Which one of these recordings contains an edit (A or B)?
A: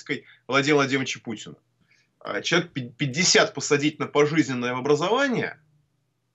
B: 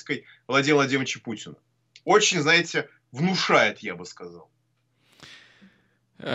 A